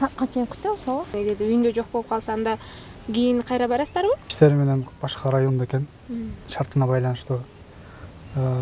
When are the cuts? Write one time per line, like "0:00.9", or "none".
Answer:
0:01.1
0:04.3